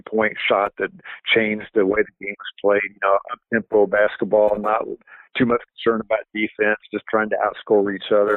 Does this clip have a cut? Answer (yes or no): no